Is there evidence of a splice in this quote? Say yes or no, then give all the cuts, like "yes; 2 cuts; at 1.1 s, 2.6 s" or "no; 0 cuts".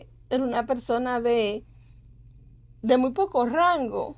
no; 0 cuts